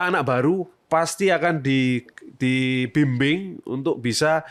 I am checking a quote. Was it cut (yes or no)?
no